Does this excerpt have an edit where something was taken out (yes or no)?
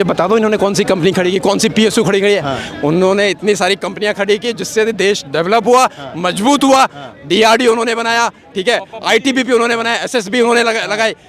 no